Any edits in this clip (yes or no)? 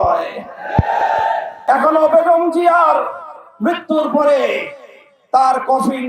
yes